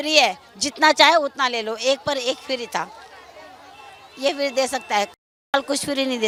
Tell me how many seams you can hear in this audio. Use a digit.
0